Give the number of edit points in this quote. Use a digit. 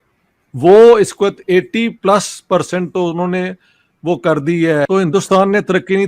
1